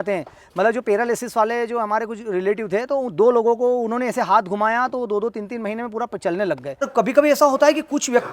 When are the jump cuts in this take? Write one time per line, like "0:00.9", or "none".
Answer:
0:06.9